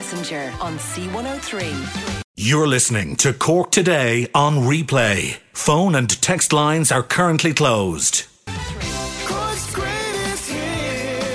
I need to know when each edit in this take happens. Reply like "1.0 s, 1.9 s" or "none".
2.2 s, 8.4 s